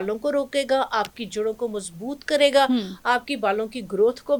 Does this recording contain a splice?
no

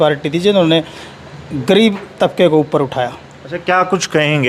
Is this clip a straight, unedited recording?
yes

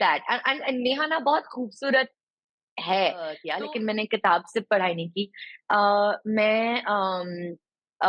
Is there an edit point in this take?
yes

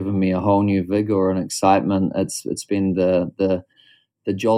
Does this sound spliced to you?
no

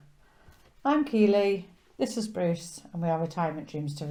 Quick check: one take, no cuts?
yes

